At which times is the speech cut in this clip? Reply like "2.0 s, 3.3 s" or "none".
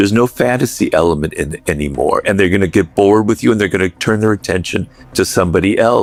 none